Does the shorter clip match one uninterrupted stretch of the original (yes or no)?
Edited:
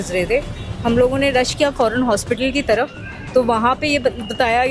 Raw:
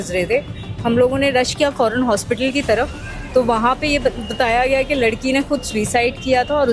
yes